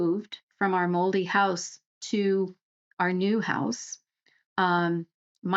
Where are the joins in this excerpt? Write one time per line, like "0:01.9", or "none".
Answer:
none